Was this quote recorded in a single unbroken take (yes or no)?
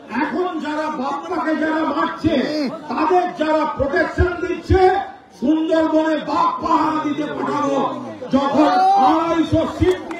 yes